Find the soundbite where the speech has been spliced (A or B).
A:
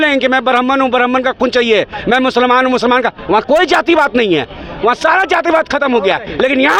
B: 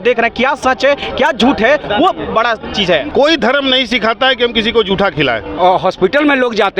B